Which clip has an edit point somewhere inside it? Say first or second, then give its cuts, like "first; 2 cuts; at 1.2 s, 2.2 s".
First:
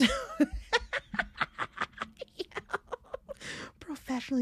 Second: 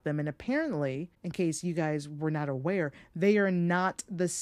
second; 1 cut; at 1.1 s